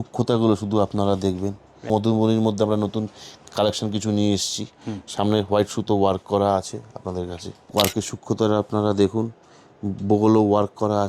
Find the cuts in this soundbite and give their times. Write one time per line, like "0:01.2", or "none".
0:01.9
0:07.5

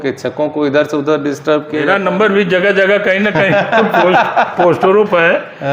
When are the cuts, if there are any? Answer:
0:01.8

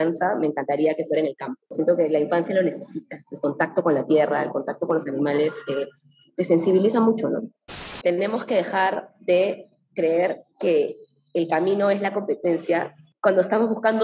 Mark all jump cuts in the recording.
0:08.0
0:13.0

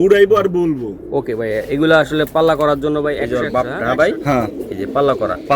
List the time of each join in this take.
0:03.2

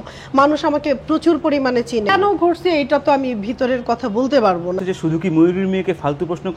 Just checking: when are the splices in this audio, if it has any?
0:02.1
0:04.8

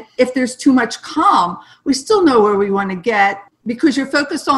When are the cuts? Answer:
0:03.5

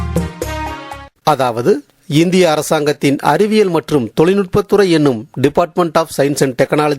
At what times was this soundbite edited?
0:01.1

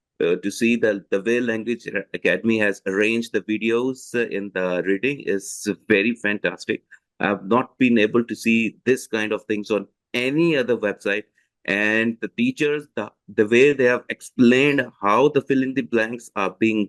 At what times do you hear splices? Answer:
none

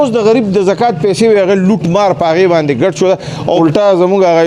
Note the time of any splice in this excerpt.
0:03.5

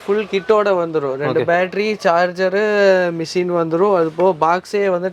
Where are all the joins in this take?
none

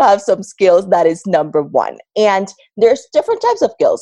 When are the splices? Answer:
none

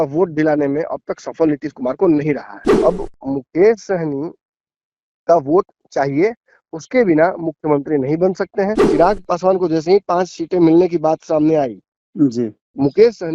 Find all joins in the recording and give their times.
0:02.6
0:08.8

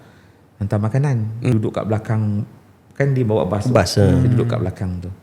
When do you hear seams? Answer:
0:01.5

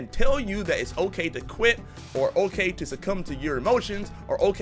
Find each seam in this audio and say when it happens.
none

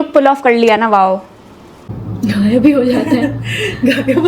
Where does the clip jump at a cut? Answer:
0:02.0

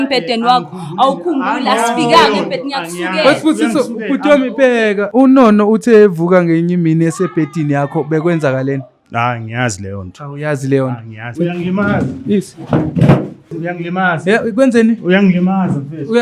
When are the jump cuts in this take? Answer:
0:05.1
0:11.3
0:13.6

